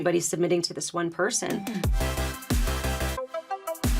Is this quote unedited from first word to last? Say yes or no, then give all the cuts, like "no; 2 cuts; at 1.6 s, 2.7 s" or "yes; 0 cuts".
no; 1 cut; at 1.7 s